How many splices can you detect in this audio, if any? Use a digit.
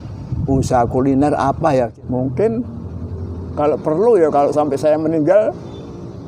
1